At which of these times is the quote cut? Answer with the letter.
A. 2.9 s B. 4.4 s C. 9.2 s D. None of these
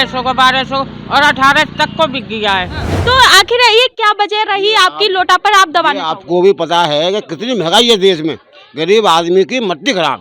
A